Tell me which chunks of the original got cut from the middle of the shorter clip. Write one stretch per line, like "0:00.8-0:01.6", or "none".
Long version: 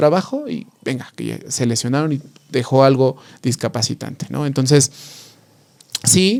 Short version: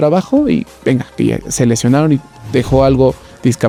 none